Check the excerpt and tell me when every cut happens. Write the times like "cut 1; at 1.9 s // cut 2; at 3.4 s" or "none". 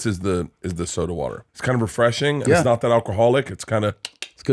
cut 1; at 1.5 s